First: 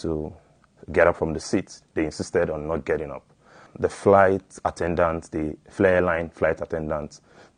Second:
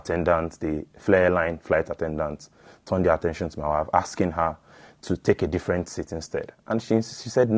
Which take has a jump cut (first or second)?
first